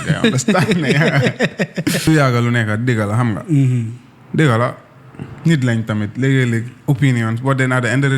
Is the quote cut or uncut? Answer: cut